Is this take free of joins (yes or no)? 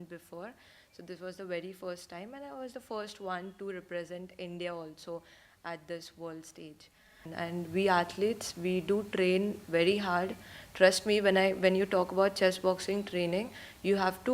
no